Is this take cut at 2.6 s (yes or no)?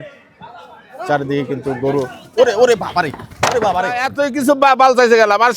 no